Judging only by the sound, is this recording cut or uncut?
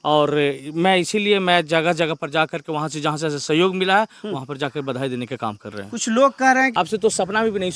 cut